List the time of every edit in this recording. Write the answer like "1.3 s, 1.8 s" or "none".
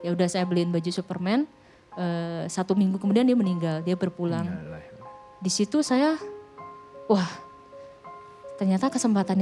none